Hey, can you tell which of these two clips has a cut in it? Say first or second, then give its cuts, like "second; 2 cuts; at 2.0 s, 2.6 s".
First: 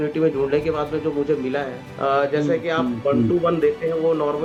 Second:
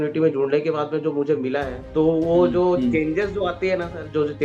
second; 1 cut; at 1.8 s